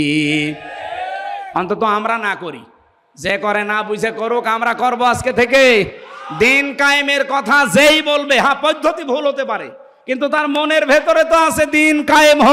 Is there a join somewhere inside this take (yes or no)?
no